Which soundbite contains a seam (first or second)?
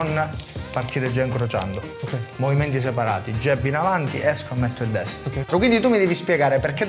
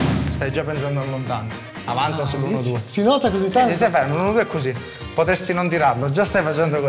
first